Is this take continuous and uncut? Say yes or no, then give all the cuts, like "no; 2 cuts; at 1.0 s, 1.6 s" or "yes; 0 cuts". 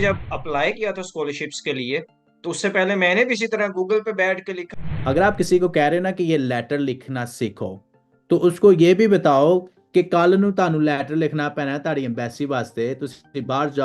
no; 1 cut; at 4.6 s